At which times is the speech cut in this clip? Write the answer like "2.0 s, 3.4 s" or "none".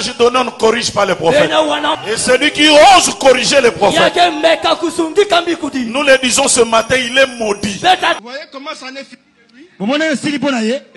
2.0 s, 8.2 s